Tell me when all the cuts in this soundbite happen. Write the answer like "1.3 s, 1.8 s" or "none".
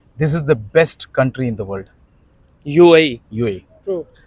none